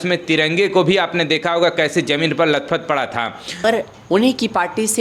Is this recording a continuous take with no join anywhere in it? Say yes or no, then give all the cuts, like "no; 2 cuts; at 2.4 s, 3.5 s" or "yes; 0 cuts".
no; 1 cut; at 3.6 s